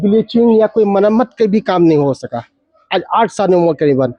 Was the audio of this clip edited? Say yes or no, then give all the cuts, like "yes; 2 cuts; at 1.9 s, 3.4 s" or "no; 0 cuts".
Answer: no; 0 cuts